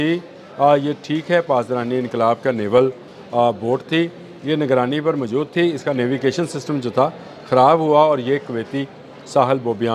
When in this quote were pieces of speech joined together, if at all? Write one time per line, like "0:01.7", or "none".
none